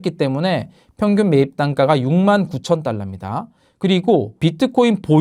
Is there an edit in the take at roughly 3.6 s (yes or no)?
no